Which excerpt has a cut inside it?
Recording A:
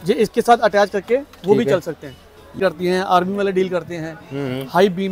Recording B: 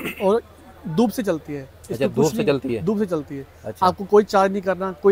A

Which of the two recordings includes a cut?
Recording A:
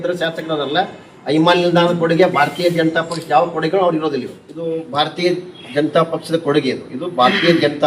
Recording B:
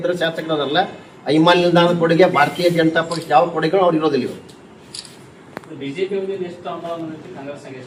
A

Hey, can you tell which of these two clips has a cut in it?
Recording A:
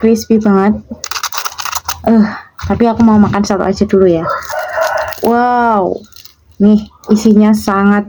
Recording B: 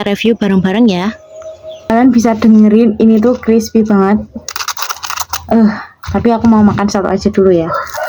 B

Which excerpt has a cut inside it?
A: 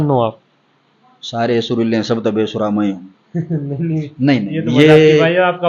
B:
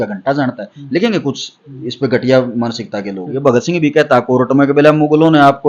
B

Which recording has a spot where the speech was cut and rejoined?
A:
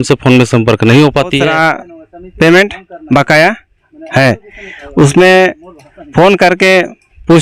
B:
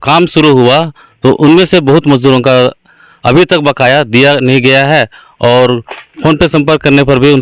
A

